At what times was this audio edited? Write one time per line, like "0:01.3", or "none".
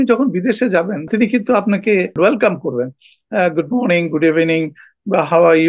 0:01.1
0:02.2